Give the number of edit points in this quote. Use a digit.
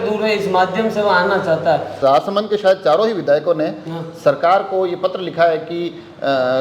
1